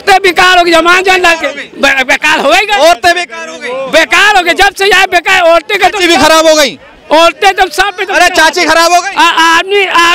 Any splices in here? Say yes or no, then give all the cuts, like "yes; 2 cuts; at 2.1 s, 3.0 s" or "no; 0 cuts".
no; 0 cuts